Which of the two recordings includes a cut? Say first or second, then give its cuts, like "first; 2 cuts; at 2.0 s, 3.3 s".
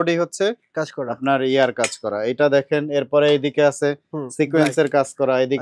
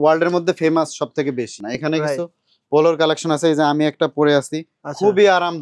second; 1 cut; at 1.7 s